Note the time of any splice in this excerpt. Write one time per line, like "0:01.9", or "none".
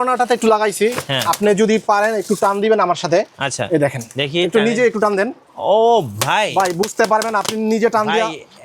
none